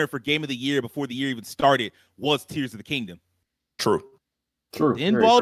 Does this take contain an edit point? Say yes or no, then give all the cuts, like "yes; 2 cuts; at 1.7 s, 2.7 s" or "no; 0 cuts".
no; 0 cuts